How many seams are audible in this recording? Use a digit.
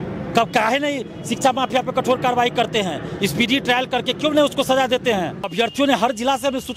1